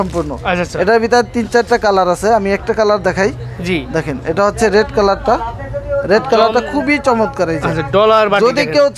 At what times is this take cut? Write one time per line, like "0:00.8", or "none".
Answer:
none